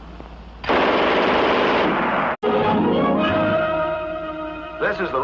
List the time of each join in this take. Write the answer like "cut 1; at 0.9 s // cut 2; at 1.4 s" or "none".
none